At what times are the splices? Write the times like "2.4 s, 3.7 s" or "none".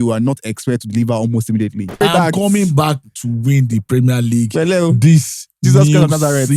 2.0 s